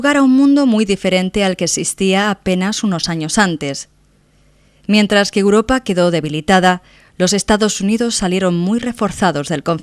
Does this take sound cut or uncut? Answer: uncut